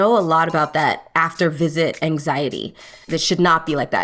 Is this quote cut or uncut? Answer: cut